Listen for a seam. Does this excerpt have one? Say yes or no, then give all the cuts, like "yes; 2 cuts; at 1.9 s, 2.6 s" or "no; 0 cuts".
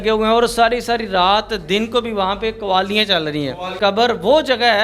yes; 1 cut; at 3.7 s